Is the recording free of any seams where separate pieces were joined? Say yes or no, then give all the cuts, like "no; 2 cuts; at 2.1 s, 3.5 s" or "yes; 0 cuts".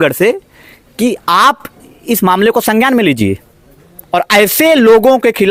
yes; 0 cuts